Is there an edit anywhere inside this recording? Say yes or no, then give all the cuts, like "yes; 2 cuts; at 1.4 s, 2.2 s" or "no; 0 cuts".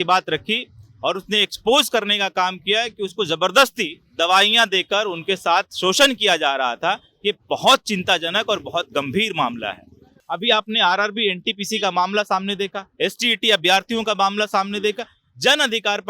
yes; 1 cut; at 10.1 s